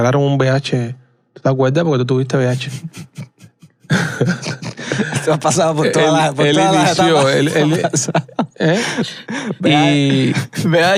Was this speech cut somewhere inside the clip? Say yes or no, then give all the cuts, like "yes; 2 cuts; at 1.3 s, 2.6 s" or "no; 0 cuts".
no; 0 cuts